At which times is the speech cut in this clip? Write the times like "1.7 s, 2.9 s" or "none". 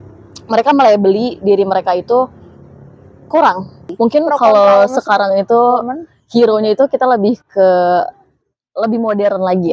3.8 s